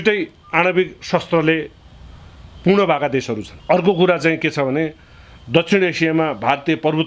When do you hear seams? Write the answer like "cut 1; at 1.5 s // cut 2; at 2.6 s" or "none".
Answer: cut 1; at 3.5 s